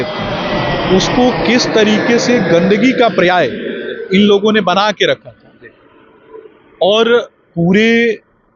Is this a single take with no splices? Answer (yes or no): yes